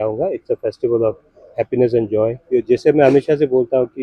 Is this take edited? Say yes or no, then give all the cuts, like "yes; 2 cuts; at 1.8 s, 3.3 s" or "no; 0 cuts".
yes; 1 cut; at 2.4 s